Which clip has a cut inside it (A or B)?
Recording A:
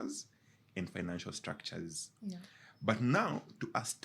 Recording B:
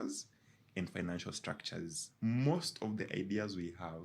B